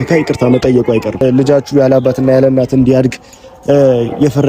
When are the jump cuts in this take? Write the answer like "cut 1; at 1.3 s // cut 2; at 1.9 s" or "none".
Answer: cut 1; at 1.2 s